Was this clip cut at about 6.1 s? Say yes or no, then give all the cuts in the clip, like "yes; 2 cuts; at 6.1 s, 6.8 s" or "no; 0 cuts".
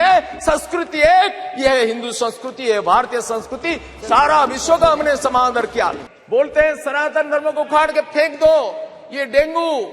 yes; 1 cut; at 6.1 s